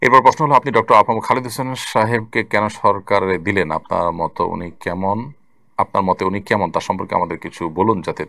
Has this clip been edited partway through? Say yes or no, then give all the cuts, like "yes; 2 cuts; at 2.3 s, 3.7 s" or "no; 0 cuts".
no; 0 cuts